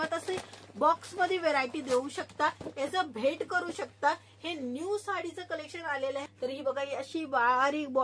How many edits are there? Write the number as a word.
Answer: one